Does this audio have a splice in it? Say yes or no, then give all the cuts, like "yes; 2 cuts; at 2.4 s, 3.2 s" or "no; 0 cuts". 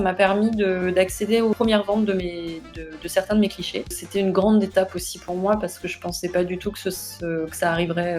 yes; 2 cuts; at 1.5 s, 4.0 s